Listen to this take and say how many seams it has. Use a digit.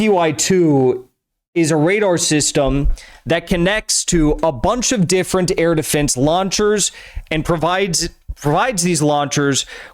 0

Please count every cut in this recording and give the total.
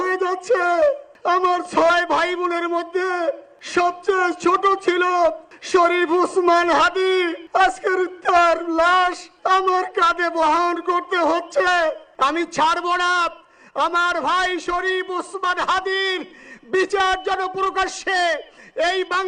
6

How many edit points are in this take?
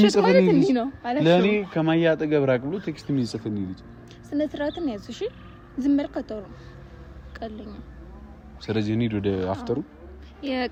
0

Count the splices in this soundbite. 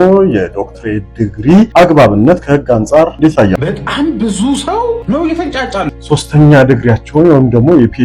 4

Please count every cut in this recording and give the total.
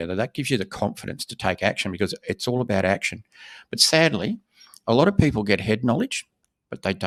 0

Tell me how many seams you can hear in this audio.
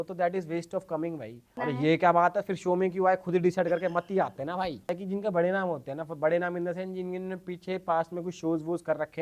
2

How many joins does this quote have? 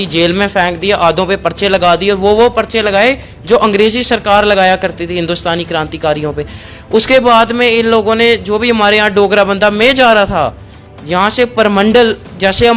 0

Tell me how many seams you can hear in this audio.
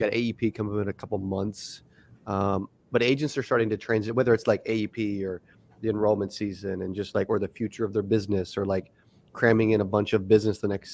0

